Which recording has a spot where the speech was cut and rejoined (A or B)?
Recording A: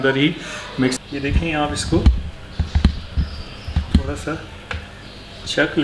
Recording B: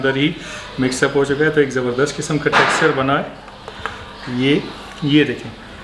A